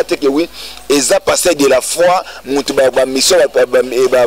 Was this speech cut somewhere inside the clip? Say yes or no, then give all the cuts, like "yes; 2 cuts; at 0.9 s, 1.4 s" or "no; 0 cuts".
no; 0 cuts